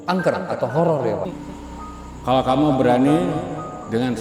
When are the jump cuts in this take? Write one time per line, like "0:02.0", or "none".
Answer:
0:01.4